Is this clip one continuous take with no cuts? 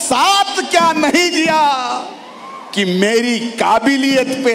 yes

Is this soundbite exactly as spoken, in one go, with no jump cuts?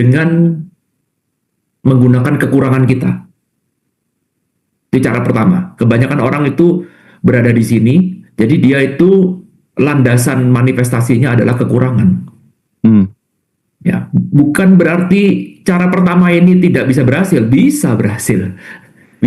yes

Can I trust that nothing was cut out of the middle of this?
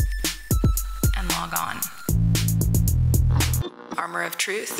no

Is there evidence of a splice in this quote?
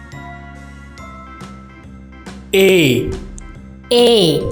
yes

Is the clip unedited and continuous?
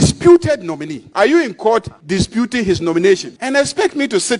no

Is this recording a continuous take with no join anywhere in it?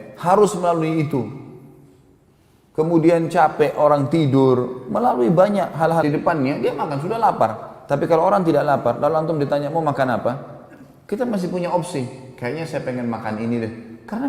no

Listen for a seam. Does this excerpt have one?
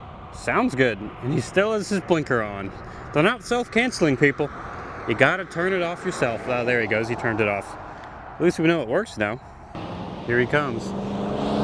no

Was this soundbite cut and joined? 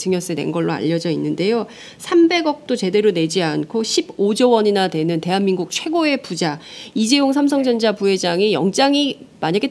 yes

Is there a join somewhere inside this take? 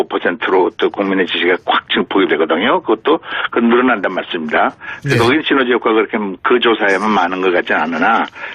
yes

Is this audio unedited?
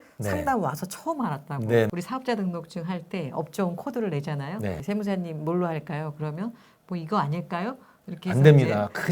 no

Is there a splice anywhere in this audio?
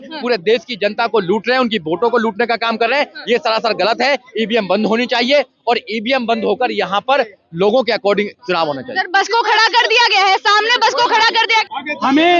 yes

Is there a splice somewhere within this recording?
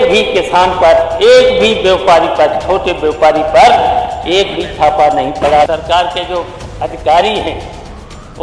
yes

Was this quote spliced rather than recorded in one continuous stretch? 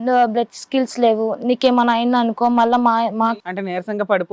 yes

